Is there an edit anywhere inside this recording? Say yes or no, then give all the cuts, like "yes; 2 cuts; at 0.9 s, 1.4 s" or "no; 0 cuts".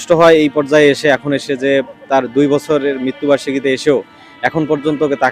no; 0 cuts